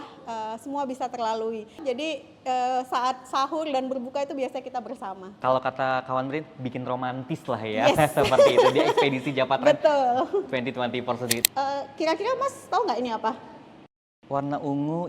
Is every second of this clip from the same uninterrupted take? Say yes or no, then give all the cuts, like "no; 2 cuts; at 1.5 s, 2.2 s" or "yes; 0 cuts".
no; 3 cuts; at 1.8 s, 5.4 s, 11.4 s